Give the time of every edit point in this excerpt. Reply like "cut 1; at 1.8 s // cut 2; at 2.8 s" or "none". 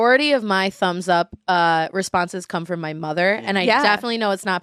none